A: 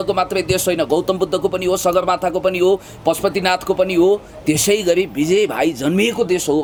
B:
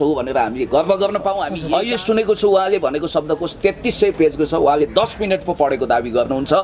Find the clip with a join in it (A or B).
B